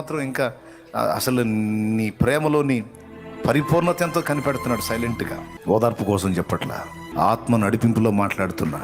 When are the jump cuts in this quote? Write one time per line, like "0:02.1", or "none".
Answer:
0:05.5
0:07.1